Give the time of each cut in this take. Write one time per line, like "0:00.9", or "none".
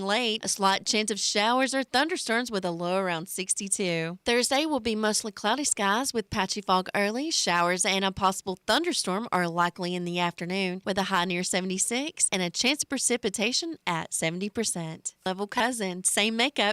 0:15.3